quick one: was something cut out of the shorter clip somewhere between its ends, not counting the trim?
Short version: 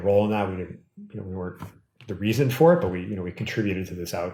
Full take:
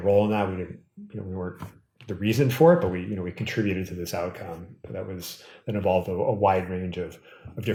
no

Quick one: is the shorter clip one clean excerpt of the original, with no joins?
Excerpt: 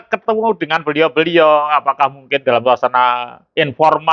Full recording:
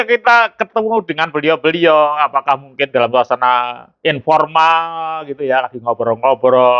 yes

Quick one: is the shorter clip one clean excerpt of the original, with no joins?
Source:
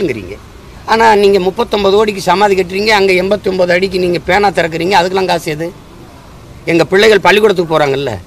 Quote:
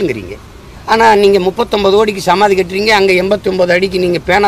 yes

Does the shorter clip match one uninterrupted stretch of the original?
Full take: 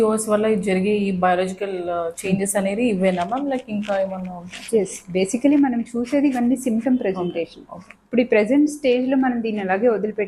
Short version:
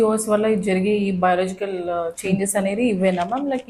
yes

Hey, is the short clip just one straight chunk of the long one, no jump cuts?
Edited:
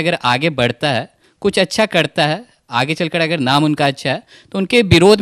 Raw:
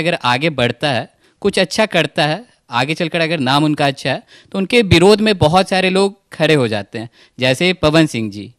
yes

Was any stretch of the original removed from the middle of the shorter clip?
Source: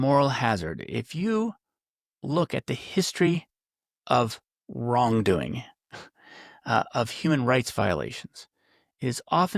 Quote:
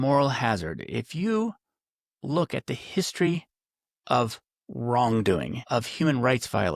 yes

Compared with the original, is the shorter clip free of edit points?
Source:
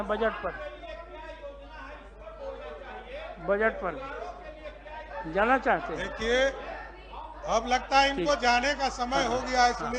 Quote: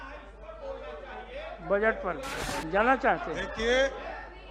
no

